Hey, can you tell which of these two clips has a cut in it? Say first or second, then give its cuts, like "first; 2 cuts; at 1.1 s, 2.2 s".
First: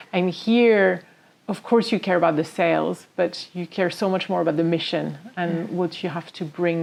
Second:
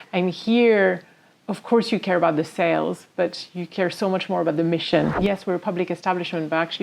second; 1 cut; at 5.2 s